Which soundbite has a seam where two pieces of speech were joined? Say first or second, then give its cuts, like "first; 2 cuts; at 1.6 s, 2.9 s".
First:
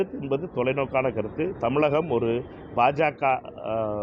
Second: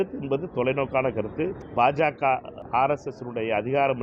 second; 2 cuts; at 1.5 s, 2.6 s